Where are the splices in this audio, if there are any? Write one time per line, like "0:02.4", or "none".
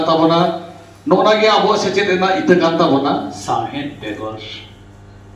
0:03.3